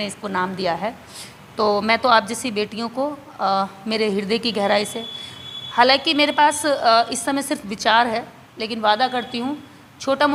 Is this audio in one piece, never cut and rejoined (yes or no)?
yes